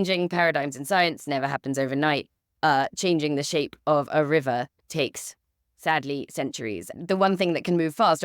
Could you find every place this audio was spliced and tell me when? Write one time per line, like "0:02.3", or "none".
0:06.9